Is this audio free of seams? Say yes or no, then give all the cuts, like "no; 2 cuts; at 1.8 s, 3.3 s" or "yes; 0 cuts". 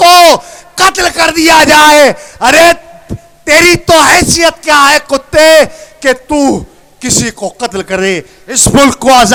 yes; 0 cuts